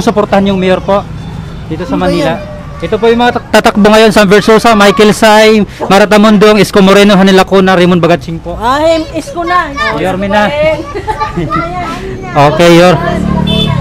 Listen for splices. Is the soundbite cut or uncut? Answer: uncut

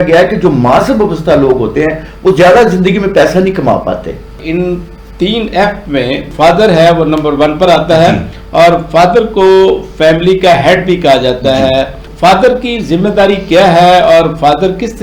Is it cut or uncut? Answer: cut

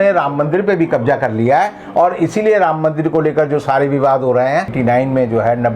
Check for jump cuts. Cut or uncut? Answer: cut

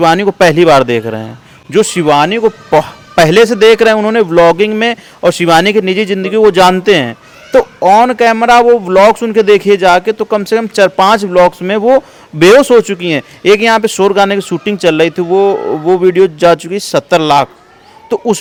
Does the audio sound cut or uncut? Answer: uncut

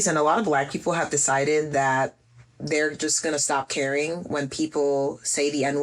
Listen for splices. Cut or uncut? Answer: uncut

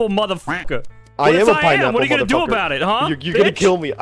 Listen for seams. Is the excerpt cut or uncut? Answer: uncut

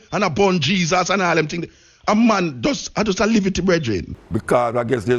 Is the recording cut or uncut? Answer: cut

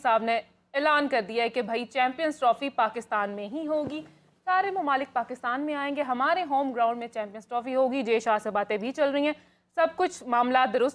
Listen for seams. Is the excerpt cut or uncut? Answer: uncut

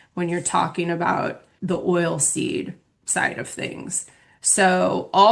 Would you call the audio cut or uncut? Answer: cut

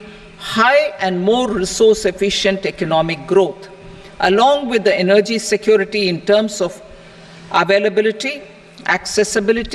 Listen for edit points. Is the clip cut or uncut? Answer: uncut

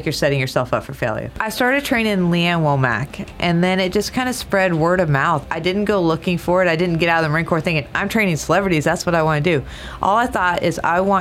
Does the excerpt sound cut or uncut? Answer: cut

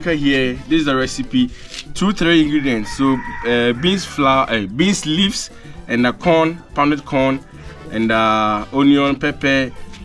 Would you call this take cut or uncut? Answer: uncut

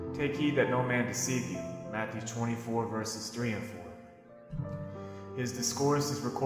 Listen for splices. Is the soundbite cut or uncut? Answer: uncut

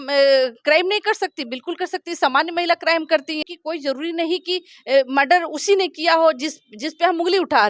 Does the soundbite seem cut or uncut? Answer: cut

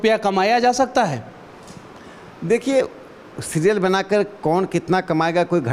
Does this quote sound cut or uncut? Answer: uncut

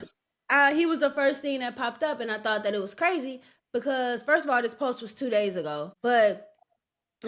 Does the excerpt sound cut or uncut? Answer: cut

